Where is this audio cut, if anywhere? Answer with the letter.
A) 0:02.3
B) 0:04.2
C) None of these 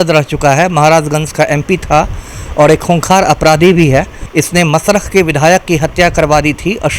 B